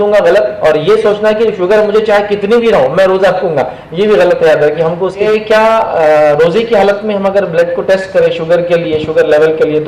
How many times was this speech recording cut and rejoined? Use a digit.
1